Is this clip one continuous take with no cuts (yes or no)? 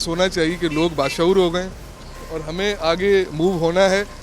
yes